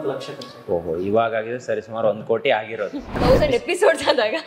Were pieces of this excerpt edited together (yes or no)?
yes